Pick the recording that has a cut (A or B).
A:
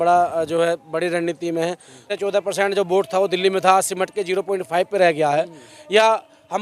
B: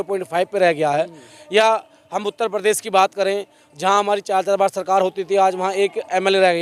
A